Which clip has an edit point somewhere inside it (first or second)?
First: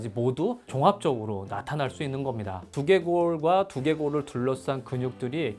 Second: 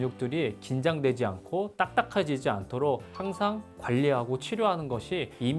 first